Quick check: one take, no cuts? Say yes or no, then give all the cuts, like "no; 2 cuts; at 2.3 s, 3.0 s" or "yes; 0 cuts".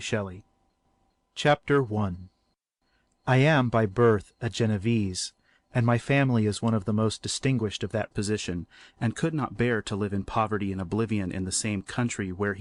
yes; 0 cuts